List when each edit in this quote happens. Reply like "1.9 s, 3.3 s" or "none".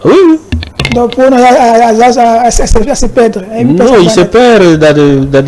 none

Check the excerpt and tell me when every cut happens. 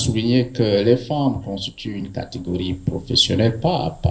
none

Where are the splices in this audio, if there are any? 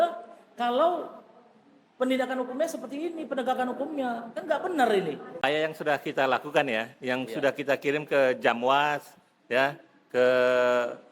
5.5 s

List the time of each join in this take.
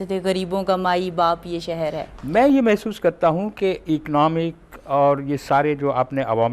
2.1 s

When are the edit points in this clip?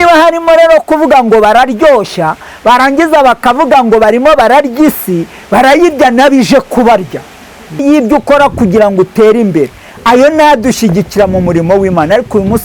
7.8 s

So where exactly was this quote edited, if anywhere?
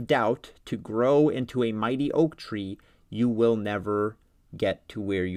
none

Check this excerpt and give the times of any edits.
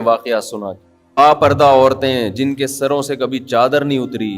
1.2 s

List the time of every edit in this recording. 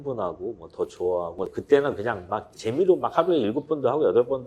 1.5 s

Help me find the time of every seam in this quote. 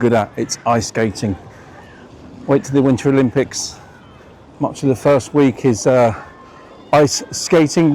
none

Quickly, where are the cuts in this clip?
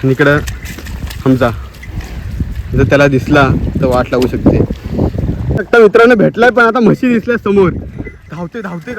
5.6 s

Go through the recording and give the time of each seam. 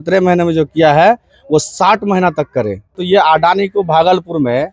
3.0 s

